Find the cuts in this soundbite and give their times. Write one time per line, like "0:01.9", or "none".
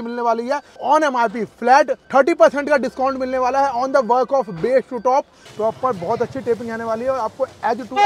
0:00.8
0:02.0
0:05.4